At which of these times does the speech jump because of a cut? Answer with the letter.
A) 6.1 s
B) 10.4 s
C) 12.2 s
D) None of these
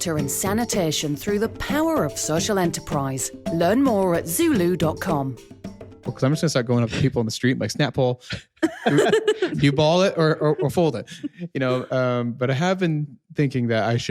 A